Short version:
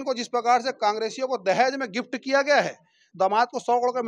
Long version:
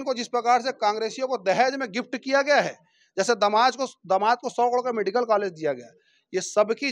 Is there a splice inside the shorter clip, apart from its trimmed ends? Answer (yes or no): yes